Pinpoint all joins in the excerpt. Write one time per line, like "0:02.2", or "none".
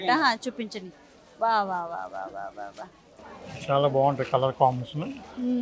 0:03.3